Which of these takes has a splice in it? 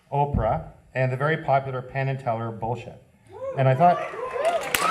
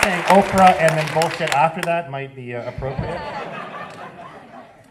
first; 1 cut; at 2.4 s

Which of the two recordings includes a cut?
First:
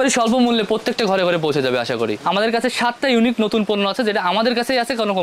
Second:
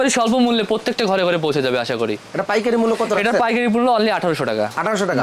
first; 1 cut; at 2.2 s

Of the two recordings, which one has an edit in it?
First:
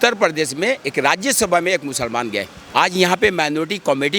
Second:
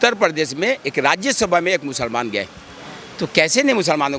first; 1 cut; at 2.6 s

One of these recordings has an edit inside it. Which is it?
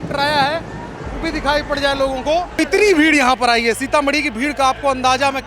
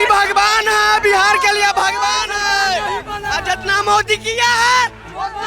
first; 1 cut; at 2.6 s

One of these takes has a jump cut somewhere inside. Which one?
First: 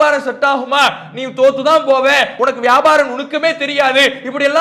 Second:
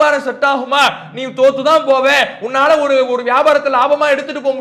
first; 1 cut; at 2.3 s

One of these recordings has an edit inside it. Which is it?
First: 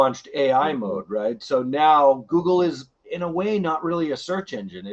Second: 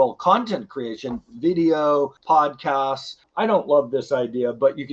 second; 2 cuts; at 2.2 s, 3.2 s

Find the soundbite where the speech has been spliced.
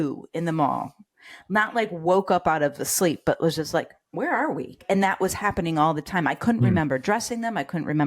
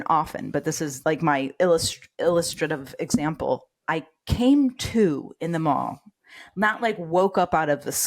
first; 2 cuts; at 4.0 s, 4.8 s

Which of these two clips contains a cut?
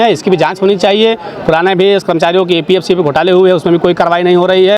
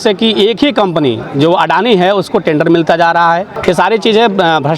second; 1 cut; at 3.6 s

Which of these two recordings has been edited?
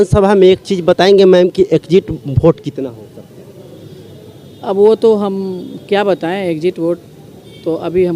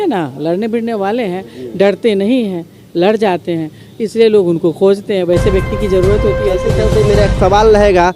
second; 1 cut; at 6.7 s

